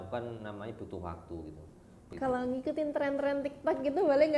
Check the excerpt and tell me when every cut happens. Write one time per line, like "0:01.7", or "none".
0:02.1